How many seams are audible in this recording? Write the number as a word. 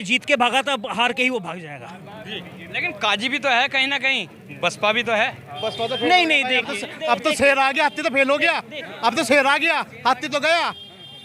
zero